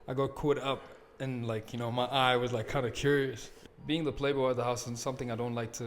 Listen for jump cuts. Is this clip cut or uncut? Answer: cut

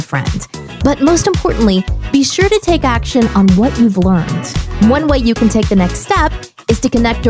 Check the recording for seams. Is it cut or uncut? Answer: uncut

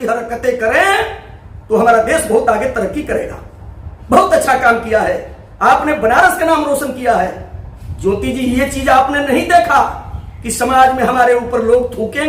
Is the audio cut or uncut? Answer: uncut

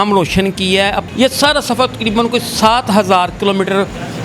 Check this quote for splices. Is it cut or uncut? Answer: cut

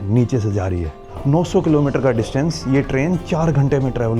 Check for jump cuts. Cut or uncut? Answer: cut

